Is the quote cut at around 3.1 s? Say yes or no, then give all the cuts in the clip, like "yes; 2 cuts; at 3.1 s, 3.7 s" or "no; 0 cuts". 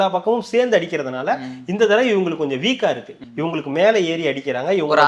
yes; 1 cut; at 3.1 s